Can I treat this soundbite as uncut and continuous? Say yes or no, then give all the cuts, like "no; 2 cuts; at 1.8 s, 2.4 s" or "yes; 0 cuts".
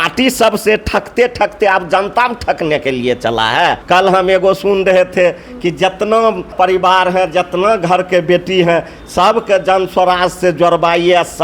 no; 2 cuts; at 3.8 s, 6.5 s